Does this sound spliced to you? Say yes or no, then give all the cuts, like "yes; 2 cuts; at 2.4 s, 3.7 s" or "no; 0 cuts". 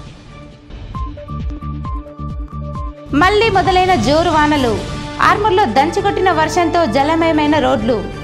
yes; 2 cuts; at 1.0 s, 2.0 s